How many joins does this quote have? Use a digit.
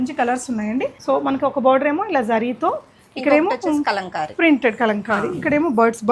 1